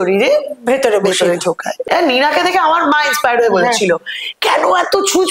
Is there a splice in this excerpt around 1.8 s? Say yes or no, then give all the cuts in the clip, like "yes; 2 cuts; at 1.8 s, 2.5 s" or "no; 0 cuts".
yes; 1 cut; at 1.8 s